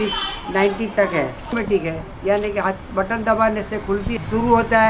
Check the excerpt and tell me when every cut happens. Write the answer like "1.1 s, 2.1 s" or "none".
1.5 s, 4.1 s